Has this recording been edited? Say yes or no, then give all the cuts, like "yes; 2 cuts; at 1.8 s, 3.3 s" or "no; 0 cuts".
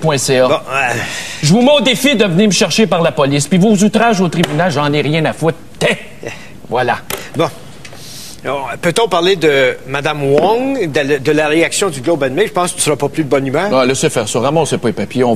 no; 0 cuts